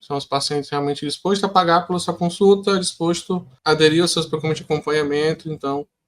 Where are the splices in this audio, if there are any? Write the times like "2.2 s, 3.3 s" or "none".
none